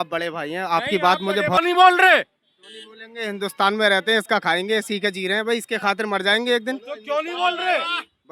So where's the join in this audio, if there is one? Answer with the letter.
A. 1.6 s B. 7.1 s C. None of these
A